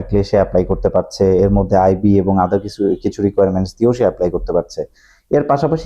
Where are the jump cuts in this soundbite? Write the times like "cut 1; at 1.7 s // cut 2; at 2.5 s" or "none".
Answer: none